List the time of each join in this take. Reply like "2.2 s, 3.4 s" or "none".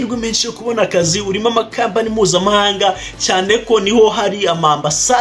none

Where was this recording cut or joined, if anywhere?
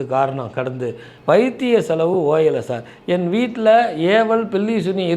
1.1 s

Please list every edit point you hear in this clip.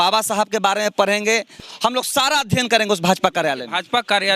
1.6 s

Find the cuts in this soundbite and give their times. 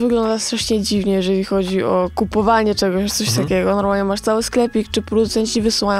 none

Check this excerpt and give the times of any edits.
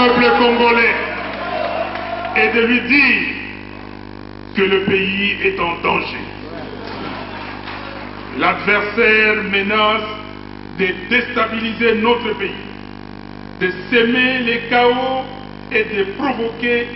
none

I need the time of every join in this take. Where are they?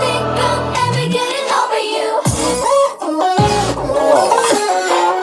none

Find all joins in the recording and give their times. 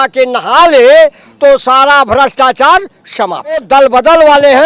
3.6 s

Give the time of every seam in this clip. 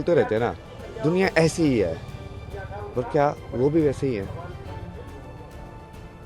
none

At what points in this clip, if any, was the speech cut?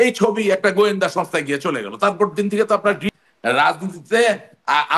3.0 s

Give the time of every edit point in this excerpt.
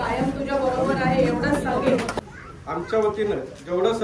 2.1 s

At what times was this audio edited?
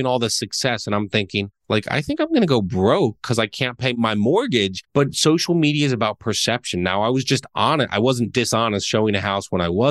1.6 s, 4.0 s, 4.8 s

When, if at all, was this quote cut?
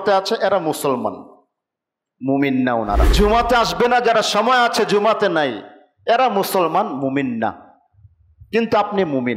3.1 s

